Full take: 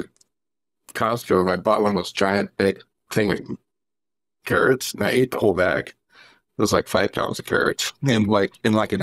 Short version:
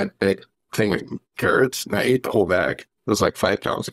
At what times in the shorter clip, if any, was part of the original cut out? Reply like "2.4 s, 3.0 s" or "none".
1.2 s, 2.9 s